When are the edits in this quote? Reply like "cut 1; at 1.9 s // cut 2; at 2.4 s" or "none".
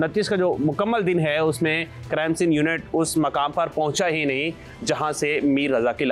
none